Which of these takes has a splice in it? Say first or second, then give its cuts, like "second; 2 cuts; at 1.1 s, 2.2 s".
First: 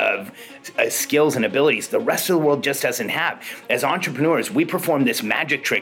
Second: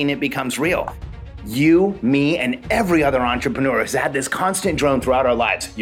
second; 1 cut; at 1.1 s